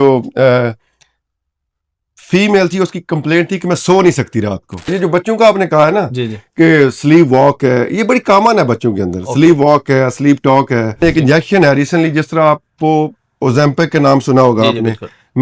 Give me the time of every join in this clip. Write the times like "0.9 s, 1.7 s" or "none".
4.9 s, 11.0 s